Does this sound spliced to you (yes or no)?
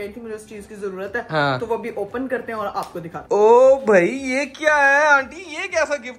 no